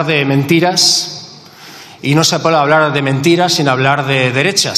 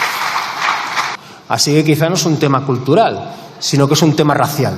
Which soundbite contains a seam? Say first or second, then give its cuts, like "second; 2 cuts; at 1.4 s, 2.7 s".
second; 1 cut; at 1.2 s